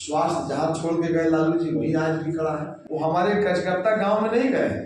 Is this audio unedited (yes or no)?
no